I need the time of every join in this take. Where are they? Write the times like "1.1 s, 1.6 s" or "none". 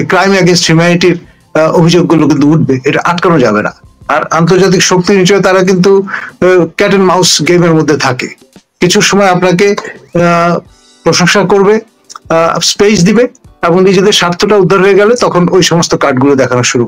none